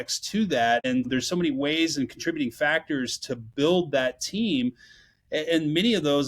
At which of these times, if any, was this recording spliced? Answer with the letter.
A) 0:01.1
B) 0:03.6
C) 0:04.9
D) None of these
A